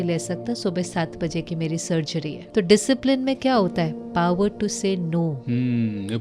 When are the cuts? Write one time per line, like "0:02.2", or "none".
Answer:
0:02.4